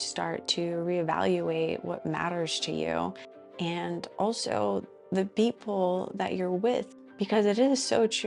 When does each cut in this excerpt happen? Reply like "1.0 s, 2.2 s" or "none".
none